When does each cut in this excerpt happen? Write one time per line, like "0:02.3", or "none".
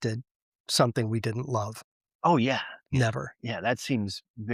none